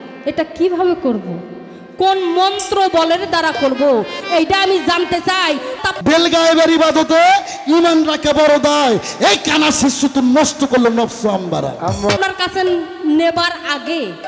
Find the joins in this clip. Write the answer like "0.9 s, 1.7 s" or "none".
5.7 s, 12.2 s

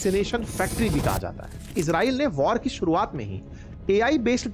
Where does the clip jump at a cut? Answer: 1.7 s

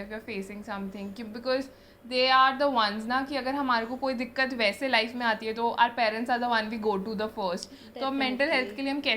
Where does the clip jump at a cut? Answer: none

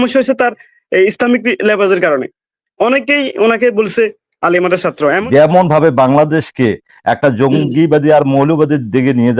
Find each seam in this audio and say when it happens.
5.2 s

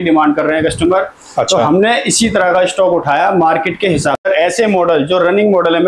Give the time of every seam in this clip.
4.2 s

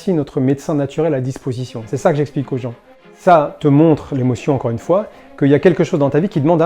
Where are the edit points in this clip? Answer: 3.1 s

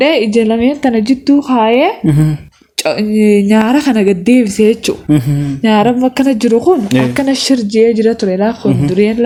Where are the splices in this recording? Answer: none

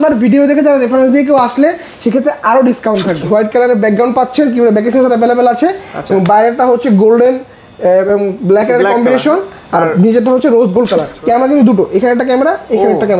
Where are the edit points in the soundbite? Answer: 3.2 s, 11.1 s

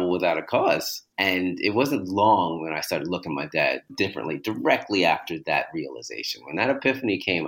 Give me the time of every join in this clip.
0.9 s, 3.9 s

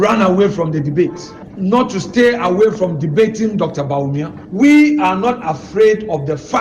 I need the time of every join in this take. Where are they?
none

